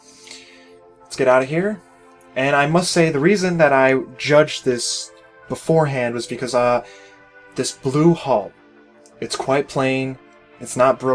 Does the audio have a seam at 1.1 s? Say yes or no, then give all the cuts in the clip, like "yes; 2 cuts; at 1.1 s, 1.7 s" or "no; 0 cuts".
yes; 1 cut; at 1.1 s